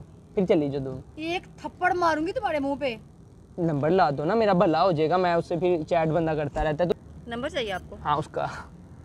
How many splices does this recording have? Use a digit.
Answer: 1